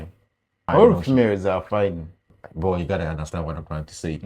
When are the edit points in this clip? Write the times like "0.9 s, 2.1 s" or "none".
0.7 s, 2.2 s